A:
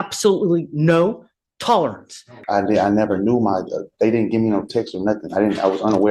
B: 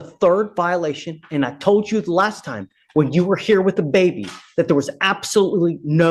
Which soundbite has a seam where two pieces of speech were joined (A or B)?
A